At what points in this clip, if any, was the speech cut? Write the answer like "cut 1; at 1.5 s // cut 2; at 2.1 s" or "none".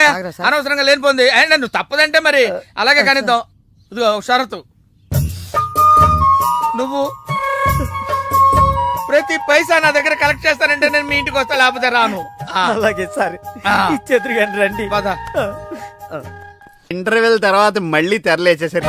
cut 1; at 16.9 s